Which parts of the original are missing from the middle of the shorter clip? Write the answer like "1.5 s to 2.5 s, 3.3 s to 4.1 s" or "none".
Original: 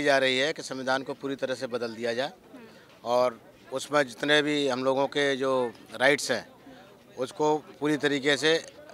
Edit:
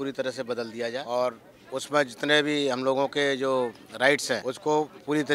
2.2 s to 3.0 s, 6.5 s to 7.2 s

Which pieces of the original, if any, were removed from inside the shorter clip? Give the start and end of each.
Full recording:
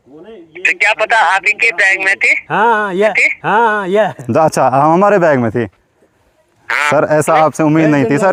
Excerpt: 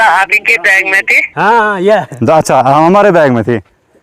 2.3 s to 3.3 s

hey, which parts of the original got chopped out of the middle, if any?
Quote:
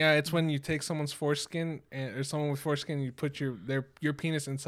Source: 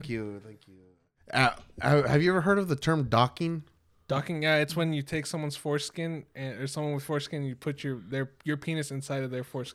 none

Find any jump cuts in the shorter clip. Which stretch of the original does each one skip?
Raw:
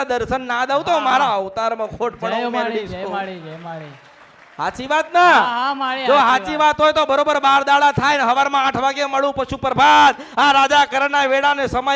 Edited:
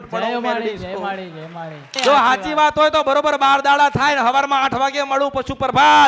4.0 s to 5.9 s

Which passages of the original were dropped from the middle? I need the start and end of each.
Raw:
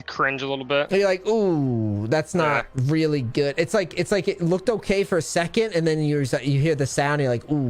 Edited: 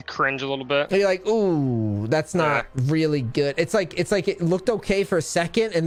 none

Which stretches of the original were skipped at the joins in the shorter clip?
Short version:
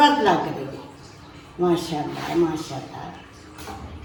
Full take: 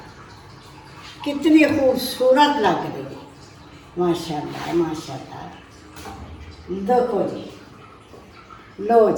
none

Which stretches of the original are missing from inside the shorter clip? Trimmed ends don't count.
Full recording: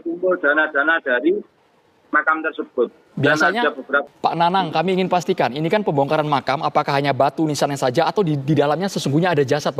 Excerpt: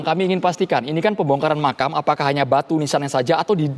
none

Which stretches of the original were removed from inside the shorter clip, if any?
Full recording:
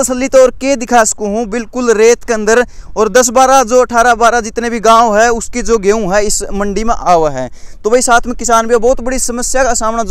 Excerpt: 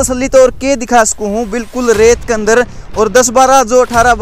none

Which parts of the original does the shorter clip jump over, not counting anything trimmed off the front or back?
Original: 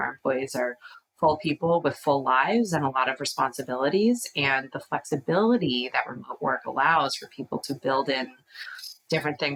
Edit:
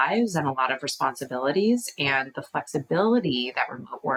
none

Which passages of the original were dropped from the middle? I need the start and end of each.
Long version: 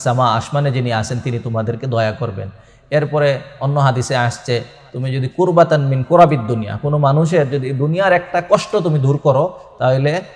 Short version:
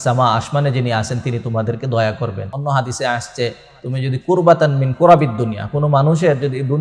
2.5 s to 3.6 s

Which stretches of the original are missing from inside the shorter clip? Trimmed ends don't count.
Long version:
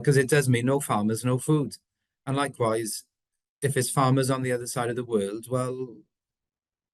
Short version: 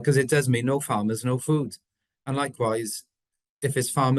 none

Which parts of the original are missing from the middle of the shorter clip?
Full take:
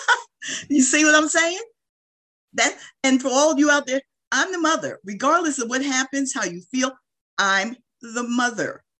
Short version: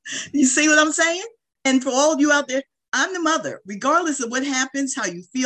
1.8 s to 2.8 s

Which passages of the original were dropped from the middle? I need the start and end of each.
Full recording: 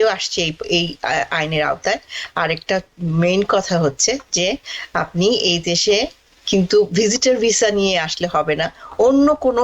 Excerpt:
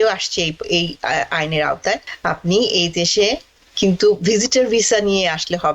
2.1 s to 4.8 s

